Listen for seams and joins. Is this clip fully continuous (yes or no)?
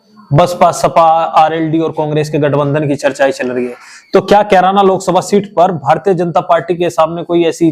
yes